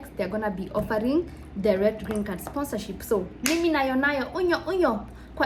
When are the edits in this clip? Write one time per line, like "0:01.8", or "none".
none

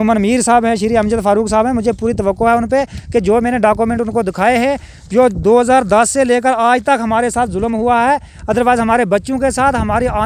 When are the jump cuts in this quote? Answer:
none

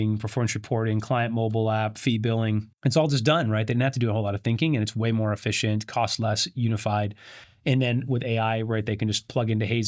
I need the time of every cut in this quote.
0:02.7

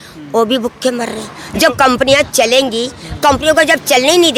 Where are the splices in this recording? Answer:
none

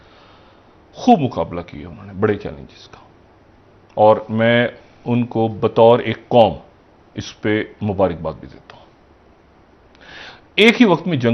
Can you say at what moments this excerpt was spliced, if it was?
none

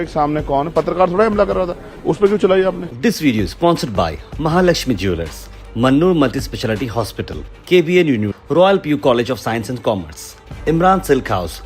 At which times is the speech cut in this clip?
0:02.9

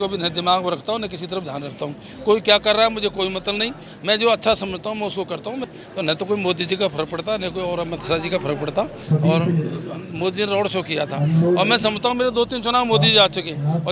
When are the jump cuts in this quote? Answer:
0:05.7

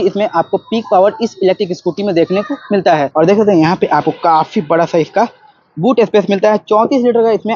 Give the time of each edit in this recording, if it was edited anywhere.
0:03.1

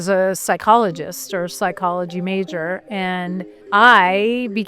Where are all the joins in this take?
0:03.5

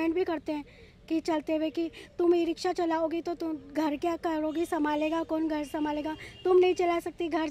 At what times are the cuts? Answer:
none

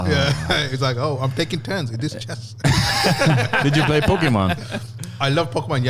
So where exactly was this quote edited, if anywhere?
none

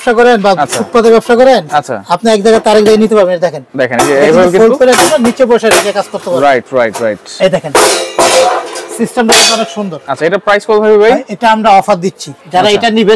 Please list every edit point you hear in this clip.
none

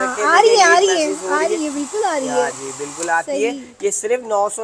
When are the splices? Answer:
none

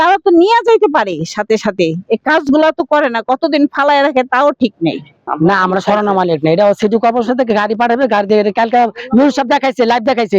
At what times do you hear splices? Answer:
0:05.1

